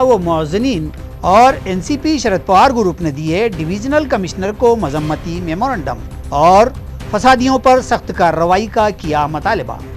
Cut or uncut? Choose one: uncut